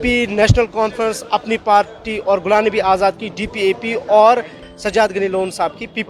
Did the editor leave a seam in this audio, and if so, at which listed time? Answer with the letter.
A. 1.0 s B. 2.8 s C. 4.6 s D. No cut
C